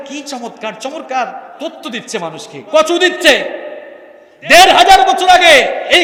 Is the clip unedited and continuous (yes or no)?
yes